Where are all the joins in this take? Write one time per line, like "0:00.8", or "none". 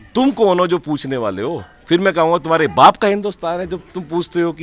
none